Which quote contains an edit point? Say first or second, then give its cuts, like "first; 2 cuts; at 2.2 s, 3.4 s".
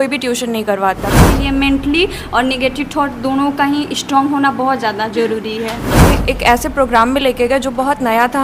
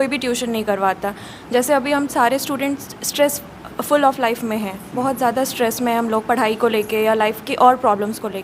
first; 2 cuts; at 1.3 s, 6.2 s